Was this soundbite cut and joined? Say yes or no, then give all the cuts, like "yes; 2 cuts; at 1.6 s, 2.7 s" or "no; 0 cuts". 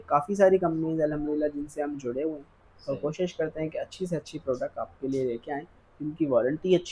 no; 0 cuts